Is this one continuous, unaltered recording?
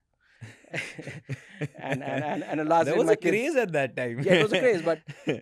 yes; 0 cuts

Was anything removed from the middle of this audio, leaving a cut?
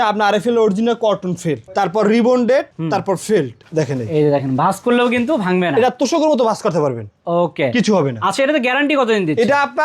yes; 1 cut; at 3.6 s

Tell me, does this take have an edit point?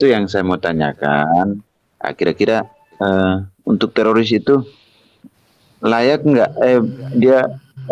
no; 0 cuts

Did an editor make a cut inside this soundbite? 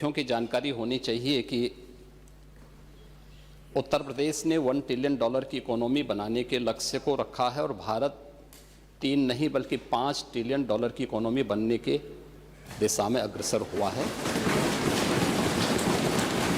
no; 0 cuts

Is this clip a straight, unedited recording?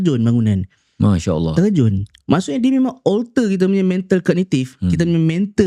yes; 0 cuts

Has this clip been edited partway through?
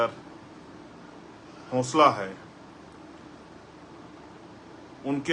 no; 0 cuts

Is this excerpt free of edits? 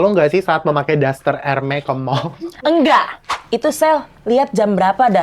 no; 1 cut; at 3.4 s

